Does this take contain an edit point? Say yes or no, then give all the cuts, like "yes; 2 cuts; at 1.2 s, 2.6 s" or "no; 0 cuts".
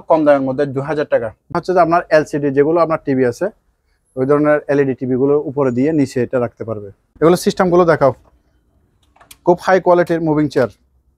yes; 2 cuts; at 1.4 s, 7.1 s